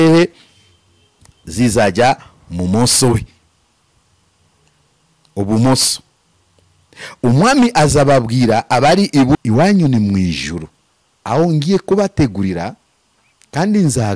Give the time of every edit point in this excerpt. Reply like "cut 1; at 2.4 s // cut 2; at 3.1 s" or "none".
cut 1; at 9.3 s

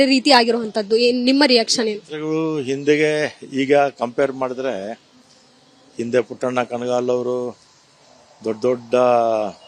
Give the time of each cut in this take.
none

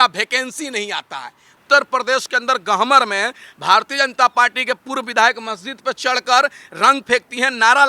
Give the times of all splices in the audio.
cut 1; at 1.5 s

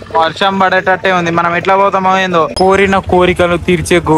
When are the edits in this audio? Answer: cut 1; at 2.5 s

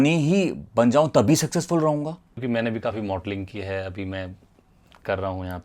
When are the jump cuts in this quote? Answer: cut 1; at 2.4 s

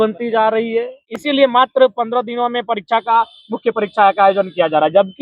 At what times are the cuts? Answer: cut 1; at 1.1 s

